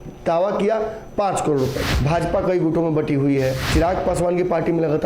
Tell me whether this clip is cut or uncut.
cut